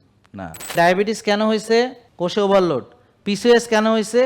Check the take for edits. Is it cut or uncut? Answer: cut